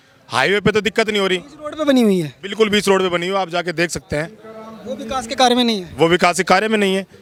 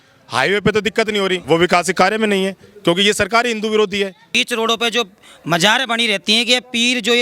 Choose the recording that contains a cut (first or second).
second